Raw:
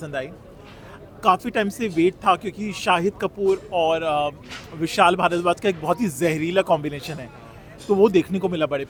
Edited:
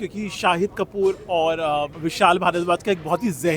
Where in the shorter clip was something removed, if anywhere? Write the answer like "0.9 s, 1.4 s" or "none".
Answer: 2.0 s